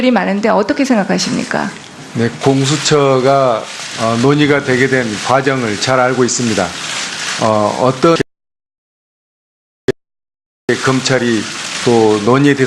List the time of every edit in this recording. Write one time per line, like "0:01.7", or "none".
none